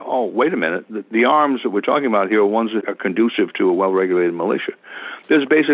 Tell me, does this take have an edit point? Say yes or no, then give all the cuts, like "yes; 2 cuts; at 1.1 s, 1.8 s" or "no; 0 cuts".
yes; 1 cut; at 2.8 s